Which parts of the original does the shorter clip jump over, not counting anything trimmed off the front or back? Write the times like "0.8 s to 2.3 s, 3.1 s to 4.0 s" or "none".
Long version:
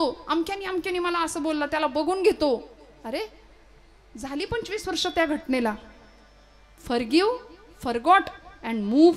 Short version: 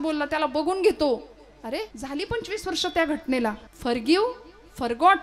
3.3 s to 4.1 s, 5.9 s to 6.7 s